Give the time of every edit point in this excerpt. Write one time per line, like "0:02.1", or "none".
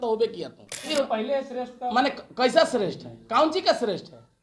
0:00.9